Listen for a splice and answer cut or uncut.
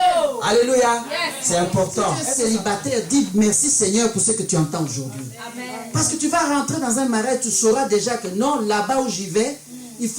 cut